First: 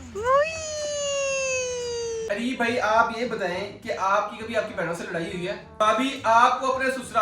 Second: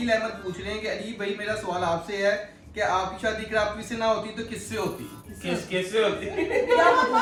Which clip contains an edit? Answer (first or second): first